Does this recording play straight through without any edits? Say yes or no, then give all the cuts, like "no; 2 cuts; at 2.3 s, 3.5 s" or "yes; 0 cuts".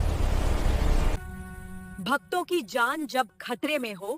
no; 1 cut; at 1.2 s